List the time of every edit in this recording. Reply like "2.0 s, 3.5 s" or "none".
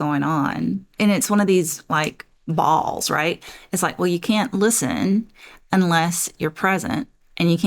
0.9 s